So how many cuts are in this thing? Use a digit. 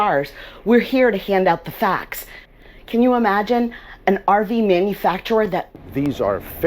2